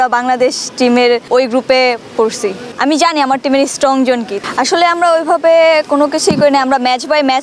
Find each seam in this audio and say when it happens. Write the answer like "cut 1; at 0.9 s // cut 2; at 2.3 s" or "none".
cut 1; at 1.3 s // cut 2; at 2.7 s // cut 3; at 4.4 s